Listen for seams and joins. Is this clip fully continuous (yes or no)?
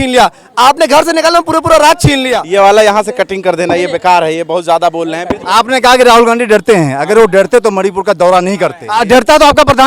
no